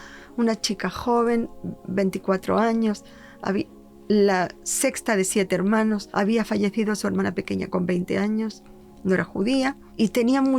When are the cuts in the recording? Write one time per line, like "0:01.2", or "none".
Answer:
none